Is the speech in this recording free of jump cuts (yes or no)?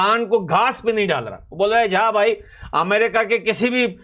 yes